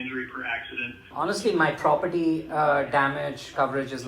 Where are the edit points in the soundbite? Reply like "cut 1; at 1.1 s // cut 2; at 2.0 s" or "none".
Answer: cut 1; at 1.1 s